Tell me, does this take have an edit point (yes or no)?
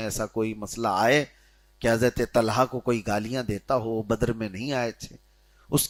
no